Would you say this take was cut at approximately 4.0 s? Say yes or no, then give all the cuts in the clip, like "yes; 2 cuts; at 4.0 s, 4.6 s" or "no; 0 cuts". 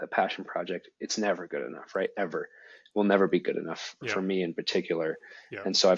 yes; 1 cut; at 4.0 s